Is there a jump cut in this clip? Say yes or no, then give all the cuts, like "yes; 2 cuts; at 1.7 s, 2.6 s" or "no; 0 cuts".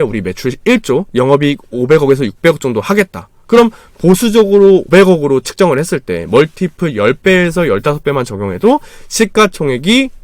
no; 0 cuts